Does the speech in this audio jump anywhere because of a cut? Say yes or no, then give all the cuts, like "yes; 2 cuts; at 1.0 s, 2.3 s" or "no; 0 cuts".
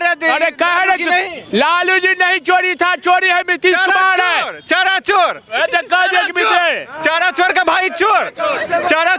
no; 0 cuts